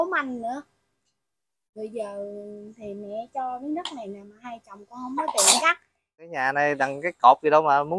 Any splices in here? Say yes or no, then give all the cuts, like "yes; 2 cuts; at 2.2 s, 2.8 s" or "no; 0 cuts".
yes; 1 cut; at 6.2 s